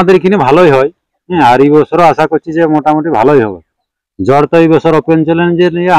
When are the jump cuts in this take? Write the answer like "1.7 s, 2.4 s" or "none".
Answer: none